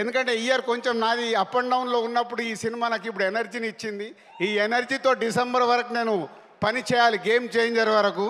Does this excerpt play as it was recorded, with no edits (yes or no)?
yes